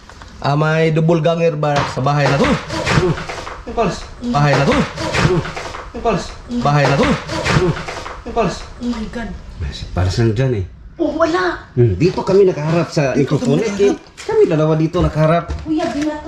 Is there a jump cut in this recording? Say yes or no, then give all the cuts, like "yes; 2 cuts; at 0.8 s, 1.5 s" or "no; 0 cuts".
no; 0 cuts